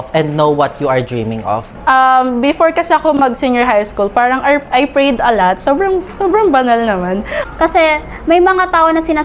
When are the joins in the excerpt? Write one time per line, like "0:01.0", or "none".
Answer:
0:01.7
0:07.4